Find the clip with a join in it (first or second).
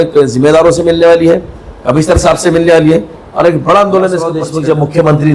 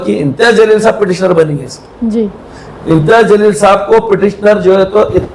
first